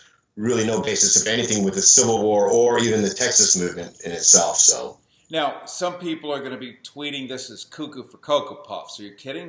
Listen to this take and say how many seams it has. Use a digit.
0